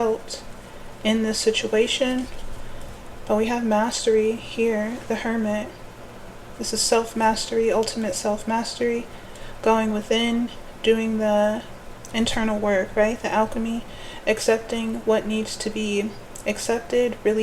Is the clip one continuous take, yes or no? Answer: yes